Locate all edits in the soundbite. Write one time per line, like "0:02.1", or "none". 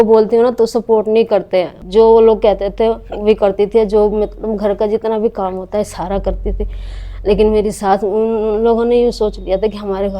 0:01.8

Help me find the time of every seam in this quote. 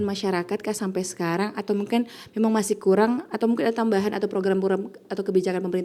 none

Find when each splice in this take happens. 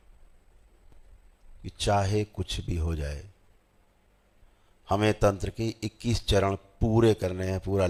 none

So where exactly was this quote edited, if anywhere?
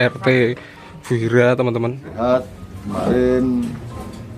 0:02.0

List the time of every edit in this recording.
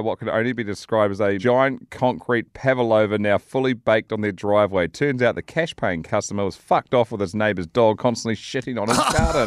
0:06.0

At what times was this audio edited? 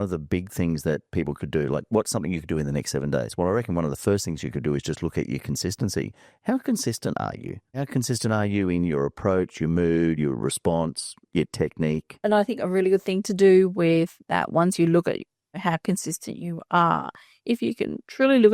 0:07.8
0:12.1
0:15.6

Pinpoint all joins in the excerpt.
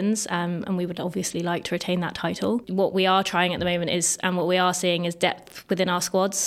0:02.7

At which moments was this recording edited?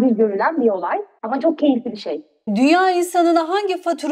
none

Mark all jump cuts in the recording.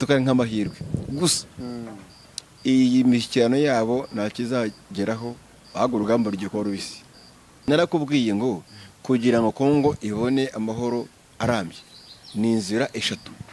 0:07.6

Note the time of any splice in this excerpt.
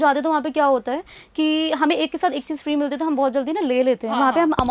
none

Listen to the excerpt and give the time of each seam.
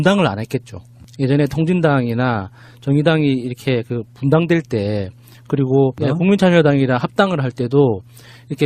0:06.7

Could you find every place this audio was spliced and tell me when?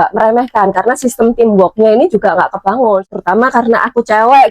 0:03.1

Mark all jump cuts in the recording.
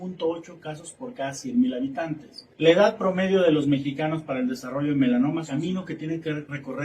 0:05.5

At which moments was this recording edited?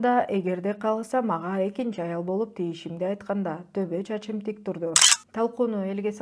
0:05.2

